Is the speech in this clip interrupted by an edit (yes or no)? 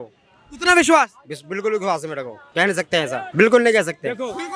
yes